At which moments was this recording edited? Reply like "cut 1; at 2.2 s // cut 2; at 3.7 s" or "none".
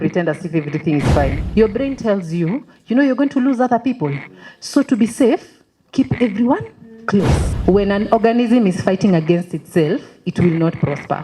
cut 1; at 1.4 s // cut 2; at 7.4 s